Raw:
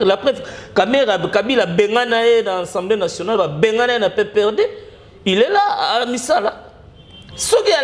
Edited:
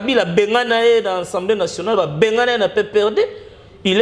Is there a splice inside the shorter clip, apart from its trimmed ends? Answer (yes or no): no